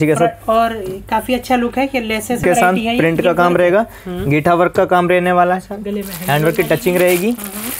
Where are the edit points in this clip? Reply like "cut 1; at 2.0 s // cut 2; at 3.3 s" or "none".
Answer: cut 1; at 2.4 s